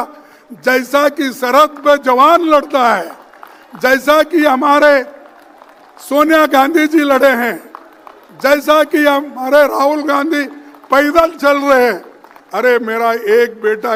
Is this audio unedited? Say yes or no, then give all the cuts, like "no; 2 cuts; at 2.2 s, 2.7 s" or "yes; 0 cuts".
yes; 0 cuts